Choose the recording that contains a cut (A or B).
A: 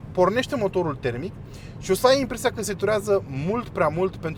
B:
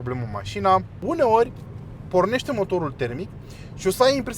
B